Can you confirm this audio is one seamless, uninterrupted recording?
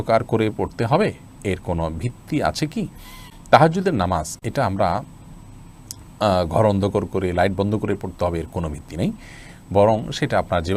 yes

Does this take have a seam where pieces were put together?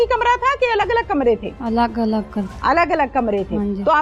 no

